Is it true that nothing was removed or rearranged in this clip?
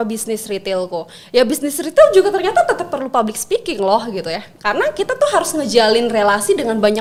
yes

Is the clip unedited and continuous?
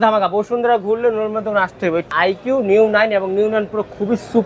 no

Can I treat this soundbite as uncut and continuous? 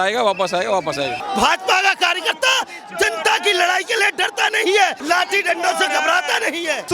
no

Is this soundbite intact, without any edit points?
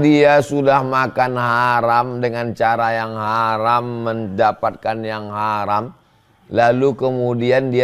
yes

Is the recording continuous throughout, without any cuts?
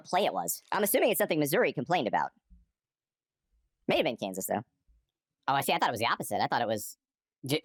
yes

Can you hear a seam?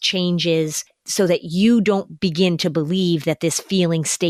no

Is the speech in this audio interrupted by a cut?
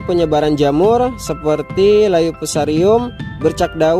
no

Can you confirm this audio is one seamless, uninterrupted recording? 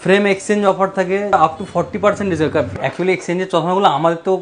no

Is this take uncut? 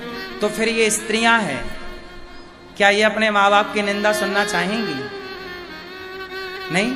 yes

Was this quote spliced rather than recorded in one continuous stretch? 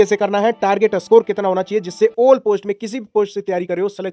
no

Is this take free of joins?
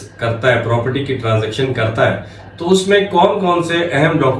yes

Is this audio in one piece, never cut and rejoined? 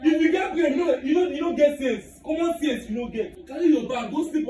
no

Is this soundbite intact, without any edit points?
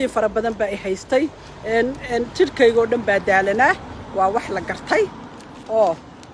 yes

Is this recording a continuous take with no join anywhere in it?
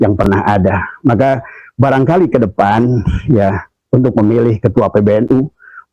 yes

